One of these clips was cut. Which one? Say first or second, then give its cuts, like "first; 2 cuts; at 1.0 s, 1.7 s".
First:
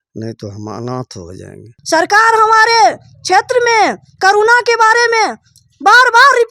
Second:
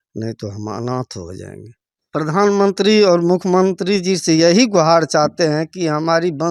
first; 1 cut; at 1.7 s